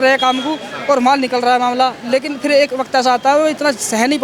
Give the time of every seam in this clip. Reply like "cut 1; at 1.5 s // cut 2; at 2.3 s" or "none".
none